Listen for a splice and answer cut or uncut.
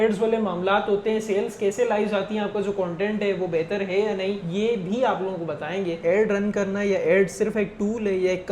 cut